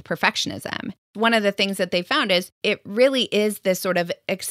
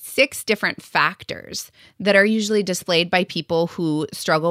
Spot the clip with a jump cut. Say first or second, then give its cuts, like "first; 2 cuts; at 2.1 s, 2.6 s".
first; 2 cuts; at 1.1 s, 2.5 s